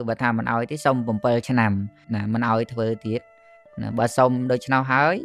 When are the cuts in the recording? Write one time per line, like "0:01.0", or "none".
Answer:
0:02.0

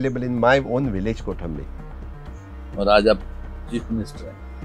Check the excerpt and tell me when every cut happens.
none

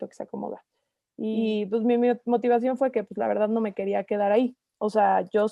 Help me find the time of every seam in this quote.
0:01.3

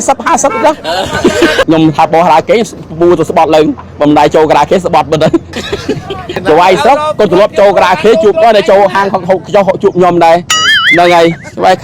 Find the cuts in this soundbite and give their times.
0:01.6
0:06.4

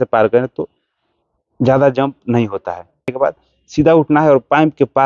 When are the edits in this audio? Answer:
0:03.1

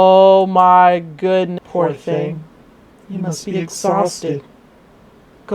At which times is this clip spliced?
0:01.5

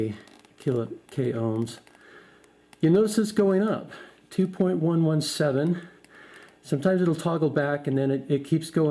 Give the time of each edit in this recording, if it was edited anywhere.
0:07.8

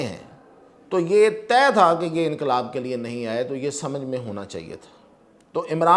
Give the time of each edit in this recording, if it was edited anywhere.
none

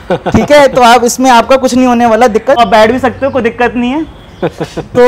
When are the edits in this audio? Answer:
0:02.6

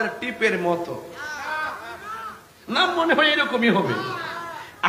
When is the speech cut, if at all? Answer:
none

